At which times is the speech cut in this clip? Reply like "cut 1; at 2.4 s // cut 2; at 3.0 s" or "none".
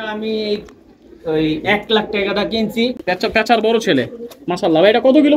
cut 1; at 2.9 s